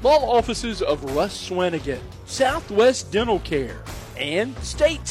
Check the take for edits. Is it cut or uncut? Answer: uncut